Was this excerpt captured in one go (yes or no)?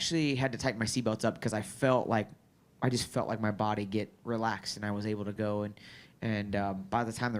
yes